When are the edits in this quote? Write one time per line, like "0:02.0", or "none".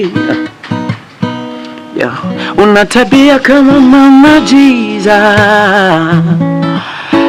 none